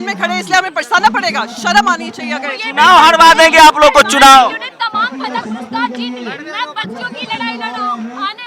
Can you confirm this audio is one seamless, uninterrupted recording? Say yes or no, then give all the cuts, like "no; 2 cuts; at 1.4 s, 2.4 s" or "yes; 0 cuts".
yes; 0 cuts